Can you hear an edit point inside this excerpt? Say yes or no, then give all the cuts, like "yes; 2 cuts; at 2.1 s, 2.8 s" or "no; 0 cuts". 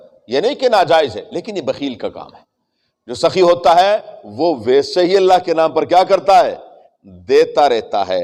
no; 0 cuts